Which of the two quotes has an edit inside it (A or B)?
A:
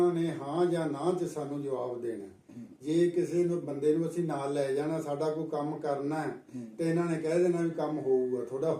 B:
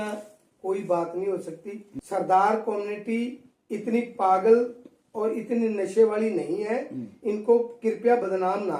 B